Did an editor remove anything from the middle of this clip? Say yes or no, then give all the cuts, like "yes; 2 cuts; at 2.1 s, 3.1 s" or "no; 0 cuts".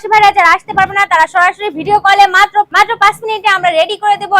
yes; 1 cut; at 2.7 s